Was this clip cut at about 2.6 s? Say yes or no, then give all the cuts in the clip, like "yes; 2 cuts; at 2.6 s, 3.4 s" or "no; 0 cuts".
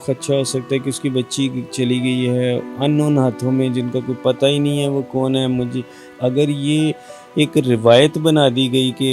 no; 1 cut; at 6.1 s